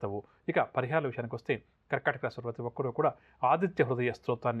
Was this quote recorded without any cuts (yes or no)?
yes